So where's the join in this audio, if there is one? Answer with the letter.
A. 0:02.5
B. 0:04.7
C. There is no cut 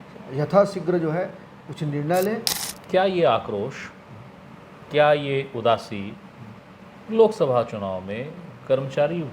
A